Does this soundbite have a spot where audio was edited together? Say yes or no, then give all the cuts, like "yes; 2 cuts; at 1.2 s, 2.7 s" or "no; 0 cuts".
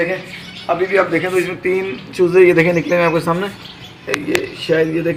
no; 0 cuts